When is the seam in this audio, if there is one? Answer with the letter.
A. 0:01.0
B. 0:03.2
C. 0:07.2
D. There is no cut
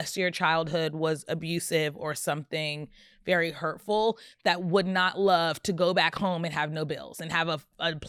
D